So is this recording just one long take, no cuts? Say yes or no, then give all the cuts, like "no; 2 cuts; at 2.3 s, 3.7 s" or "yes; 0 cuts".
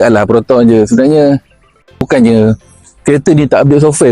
no; 1 cut; at 2.0 s